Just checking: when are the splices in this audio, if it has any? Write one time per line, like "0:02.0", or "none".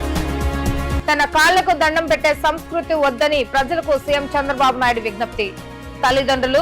0:01.0